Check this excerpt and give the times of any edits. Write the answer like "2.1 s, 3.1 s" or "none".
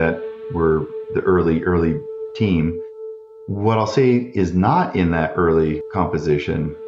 5.8 s